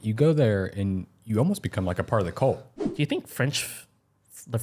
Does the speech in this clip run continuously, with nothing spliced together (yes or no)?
no